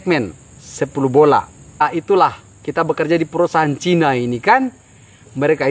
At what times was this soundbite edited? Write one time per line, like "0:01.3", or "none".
0:01.8